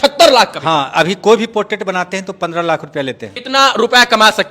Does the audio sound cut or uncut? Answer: cut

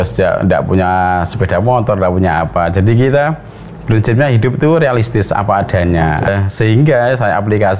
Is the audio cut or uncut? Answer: cut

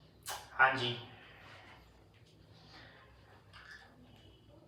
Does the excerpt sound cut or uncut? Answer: uncut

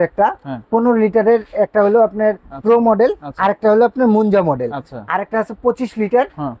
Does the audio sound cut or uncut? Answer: uncut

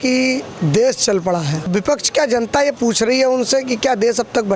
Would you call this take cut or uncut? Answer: cut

